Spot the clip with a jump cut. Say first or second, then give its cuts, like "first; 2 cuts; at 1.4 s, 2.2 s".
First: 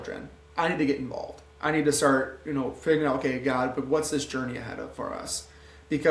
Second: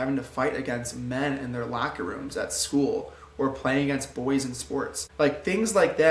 second; 1 cut; at 5.0 s